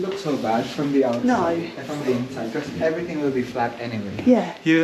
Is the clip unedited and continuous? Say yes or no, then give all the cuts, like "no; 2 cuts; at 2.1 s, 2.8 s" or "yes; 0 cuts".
yes; 0 cuts